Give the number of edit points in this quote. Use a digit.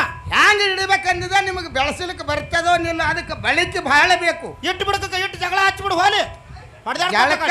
0